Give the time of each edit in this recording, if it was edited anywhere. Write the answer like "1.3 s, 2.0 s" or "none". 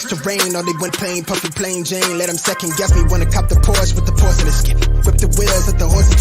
0.9 s